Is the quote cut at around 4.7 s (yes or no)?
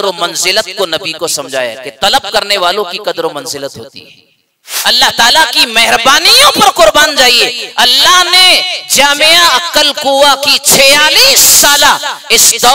yes